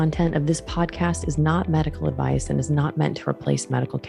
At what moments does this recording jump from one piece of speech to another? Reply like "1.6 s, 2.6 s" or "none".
none